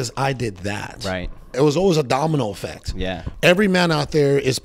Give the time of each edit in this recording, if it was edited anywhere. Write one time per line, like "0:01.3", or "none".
0:01.5
0:03.2